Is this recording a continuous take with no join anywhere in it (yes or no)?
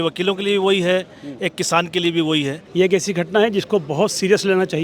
no